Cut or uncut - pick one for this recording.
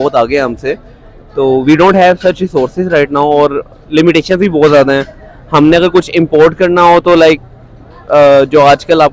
uncut